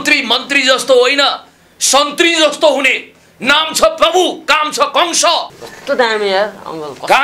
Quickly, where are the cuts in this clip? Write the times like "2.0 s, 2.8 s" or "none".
5.6 s